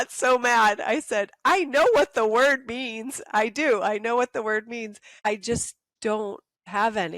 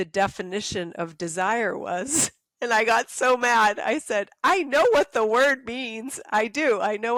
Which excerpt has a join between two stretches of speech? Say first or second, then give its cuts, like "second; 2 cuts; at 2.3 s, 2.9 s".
first; 2 cuts; at 5.2 s, 6.2 s